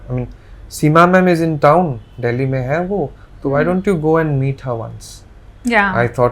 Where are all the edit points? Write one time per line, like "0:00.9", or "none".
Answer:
0:05.4